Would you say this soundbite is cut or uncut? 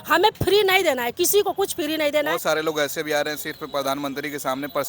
cut